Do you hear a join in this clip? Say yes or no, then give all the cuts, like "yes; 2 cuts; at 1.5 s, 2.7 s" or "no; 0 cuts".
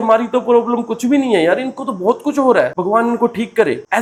no; 0 cuts